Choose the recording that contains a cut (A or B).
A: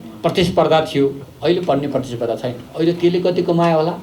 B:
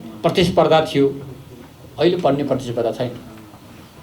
A